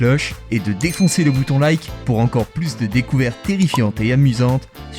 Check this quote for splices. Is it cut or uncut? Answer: uncut